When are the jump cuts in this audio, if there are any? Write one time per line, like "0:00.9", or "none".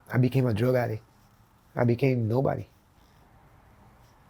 0:03.0